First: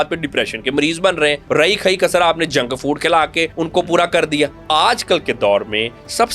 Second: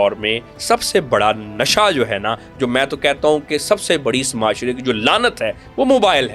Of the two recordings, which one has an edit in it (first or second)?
first